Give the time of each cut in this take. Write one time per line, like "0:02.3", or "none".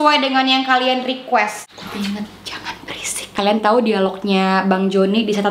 0:01.7
0:03.1